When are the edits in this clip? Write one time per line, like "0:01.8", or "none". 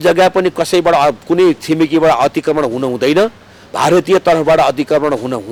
none